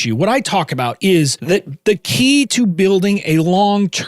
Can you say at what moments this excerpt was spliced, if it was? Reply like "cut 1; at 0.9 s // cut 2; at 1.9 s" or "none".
cut 1; at 1.4 s